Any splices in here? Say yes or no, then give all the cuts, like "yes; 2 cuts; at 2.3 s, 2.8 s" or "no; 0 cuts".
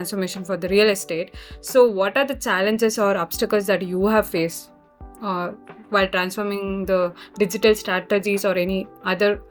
no; 0 cuts